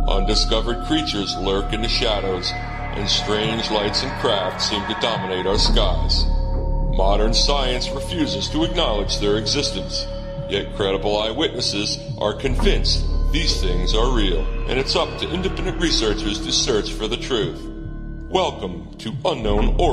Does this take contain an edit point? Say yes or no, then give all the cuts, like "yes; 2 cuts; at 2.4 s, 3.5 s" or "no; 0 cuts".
no; 0 cuts